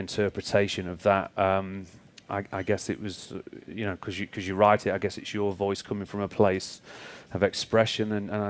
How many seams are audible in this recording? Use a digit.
0